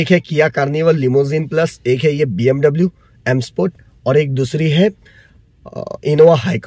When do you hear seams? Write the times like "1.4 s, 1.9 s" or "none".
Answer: none